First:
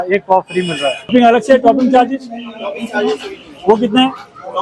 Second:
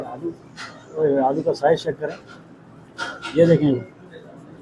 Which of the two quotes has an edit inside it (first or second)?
first